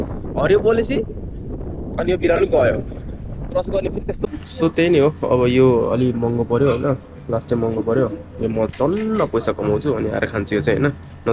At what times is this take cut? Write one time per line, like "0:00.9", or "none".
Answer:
0:04.2